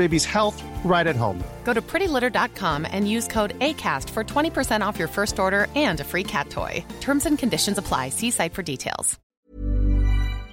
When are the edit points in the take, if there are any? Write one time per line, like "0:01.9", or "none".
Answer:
0:09.2